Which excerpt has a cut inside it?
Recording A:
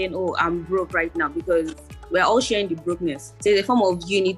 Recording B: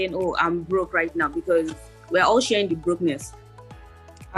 A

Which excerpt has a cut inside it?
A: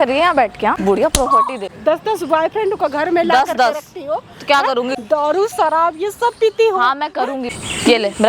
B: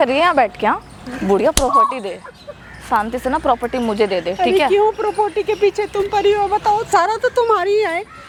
A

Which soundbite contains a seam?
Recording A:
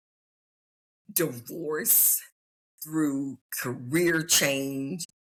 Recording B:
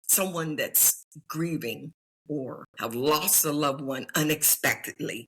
B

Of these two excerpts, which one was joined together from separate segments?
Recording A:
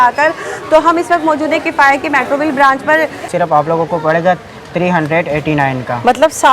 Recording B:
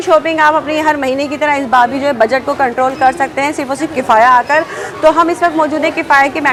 A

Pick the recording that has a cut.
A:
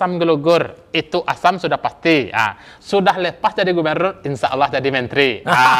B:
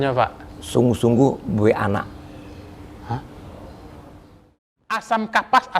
B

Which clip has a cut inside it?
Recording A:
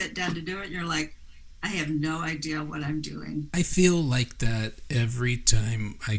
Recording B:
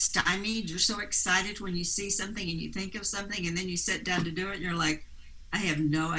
A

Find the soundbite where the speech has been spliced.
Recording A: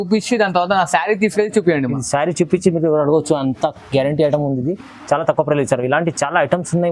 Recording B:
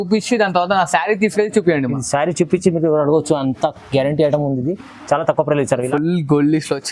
B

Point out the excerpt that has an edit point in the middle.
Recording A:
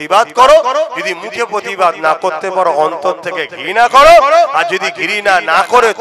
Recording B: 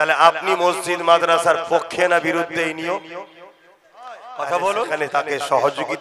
B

